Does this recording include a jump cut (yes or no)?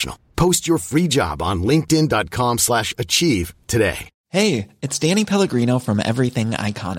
yes